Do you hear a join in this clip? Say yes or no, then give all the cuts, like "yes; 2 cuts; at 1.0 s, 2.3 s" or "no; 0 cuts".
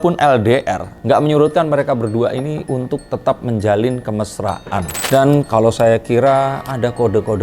yes; 1 cut; at 5.0 s